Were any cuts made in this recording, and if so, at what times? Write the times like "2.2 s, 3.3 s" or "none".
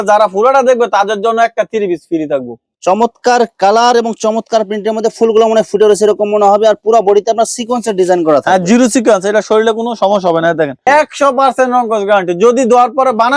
2.7 s, 10.9 s